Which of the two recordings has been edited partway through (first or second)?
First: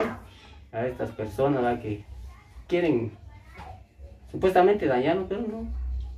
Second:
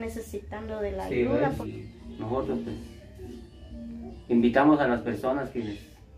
second